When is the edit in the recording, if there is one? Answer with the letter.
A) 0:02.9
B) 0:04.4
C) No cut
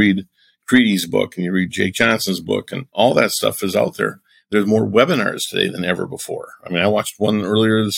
A